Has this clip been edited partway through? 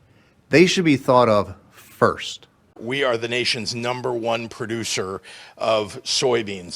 yes; 1 cut; at 2.8 s

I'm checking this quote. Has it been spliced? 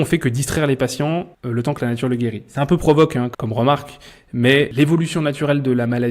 yes; 3 cuts; at 1.4 s, 3.3 s, 4.7 s

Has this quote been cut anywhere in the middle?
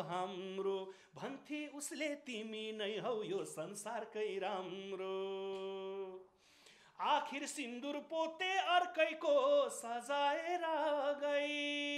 no; 0 cuts

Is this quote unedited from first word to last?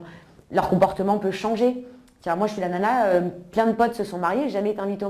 yes; 0 cuts

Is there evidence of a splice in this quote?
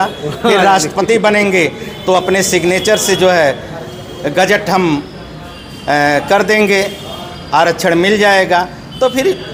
no; 0 cuts

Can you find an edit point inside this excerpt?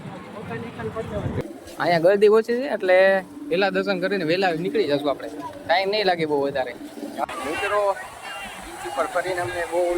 yes; 2 cuts; at 1.4 s, 7.2 s

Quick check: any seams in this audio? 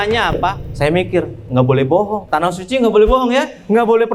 no; 0 cuts

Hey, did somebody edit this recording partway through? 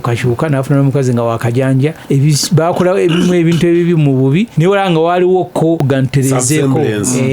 yes; 3 cuts; at 2.0 s, 4.5 s, 5.8 s

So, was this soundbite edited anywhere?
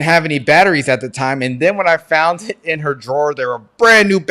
no; 0 cuts

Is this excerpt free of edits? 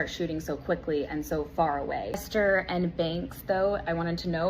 no; 1 cut; at 2.2 s

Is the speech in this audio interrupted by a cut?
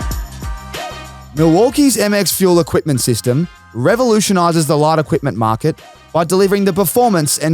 yes; 1 cut; at 0.9 s

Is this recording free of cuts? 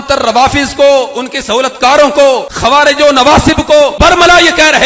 no; 2 cuts; at 2.5 s, 3.9 s

